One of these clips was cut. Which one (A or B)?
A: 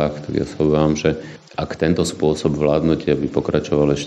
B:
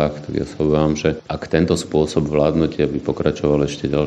B